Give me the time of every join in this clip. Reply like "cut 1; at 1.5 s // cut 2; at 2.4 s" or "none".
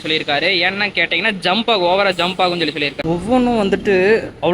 cut 1; at 2.9 s